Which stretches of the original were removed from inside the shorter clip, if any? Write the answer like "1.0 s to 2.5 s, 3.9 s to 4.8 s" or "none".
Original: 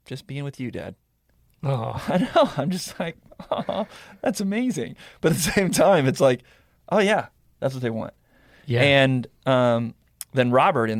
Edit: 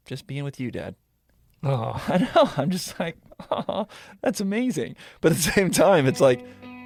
none